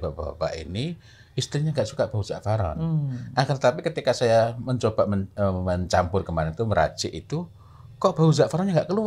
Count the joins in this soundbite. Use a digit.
0